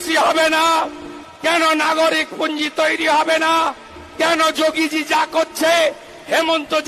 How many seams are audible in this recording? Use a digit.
0